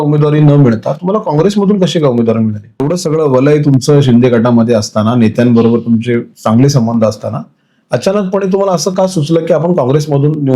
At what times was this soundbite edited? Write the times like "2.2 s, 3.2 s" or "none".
2.9 s